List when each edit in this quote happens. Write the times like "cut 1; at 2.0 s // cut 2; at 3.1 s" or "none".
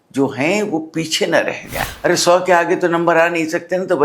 cut 1; at 1.8 s